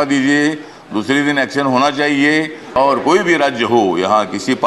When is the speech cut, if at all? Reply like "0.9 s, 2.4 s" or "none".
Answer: 2.8 s